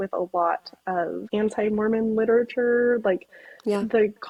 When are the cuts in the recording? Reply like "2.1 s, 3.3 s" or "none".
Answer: none

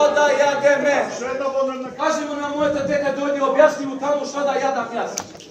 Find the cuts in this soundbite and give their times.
1.9 s

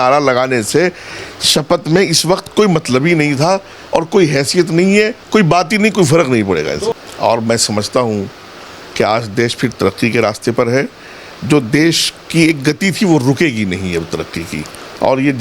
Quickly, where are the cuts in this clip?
6.8 s

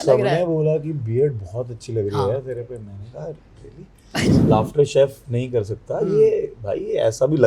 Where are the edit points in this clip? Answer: 4.4 s

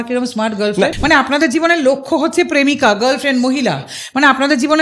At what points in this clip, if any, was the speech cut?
0.9 s

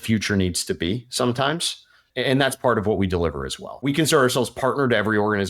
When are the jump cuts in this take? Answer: 2.0 s, 3.8 s

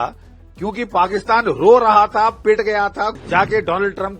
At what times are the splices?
3.1 s

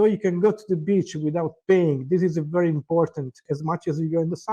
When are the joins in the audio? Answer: 3.5 s

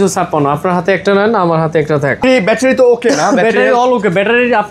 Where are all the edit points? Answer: 2.2 s

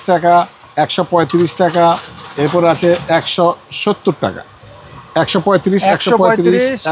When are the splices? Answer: none

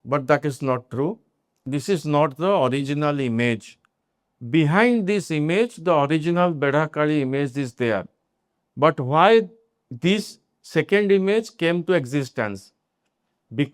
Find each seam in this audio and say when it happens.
1.7 s

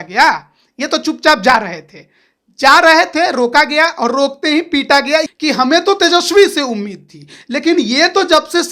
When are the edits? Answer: 5.3 s

